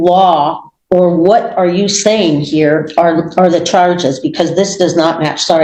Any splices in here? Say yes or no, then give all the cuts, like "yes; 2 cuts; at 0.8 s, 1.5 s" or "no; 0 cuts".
no; 0 cuts